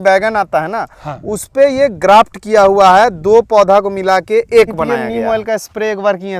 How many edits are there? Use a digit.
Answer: 1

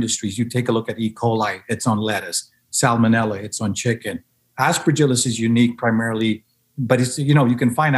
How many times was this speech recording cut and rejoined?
0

